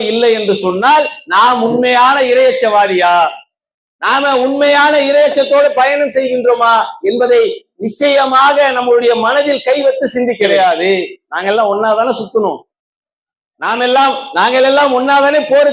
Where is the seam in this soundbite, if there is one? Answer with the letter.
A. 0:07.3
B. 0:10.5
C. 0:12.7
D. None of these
B